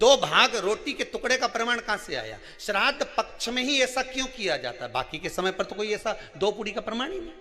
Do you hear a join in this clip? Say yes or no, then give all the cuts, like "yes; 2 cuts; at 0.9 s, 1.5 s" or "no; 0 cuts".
no; 0 cuts